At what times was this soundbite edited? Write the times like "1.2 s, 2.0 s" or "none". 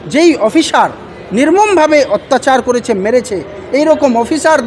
none